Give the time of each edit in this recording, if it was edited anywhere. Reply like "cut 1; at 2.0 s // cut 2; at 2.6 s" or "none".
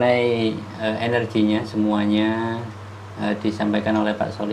none